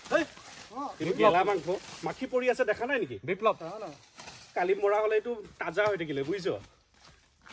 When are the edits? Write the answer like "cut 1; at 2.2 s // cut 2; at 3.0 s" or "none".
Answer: none